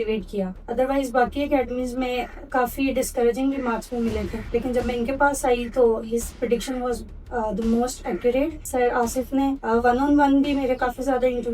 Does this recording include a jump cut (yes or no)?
yes